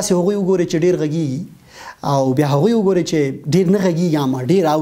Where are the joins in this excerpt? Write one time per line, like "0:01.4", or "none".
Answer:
none